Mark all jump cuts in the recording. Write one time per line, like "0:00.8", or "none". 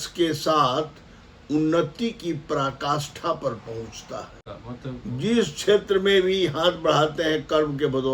0:04.4